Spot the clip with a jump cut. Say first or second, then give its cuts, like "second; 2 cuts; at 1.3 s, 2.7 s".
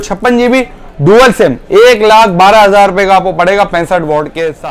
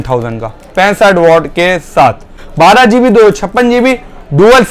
second; 1 cut; at 2.4 s